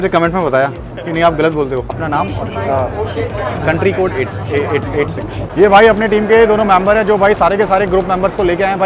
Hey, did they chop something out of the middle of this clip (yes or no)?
yes